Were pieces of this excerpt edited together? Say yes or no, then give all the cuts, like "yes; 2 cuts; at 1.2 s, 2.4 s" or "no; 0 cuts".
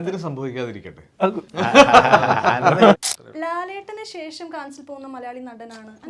yes; 2 cuts; at 1.4 s, 3.2 s